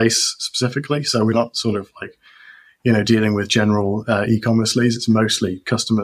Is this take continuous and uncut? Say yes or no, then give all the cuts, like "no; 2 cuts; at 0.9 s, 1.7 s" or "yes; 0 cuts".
yes; 0 cuts